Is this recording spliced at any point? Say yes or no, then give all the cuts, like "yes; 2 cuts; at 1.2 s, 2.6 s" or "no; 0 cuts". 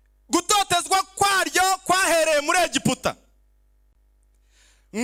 no; 0 cuts